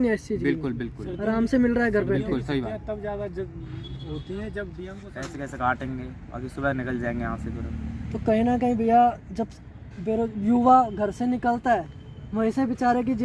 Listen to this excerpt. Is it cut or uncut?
cut